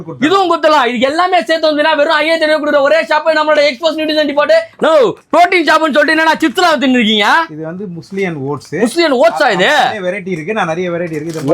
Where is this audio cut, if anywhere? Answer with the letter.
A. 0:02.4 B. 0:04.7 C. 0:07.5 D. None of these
B